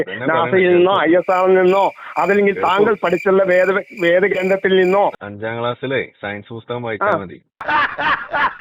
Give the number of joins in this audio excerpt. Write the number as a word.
one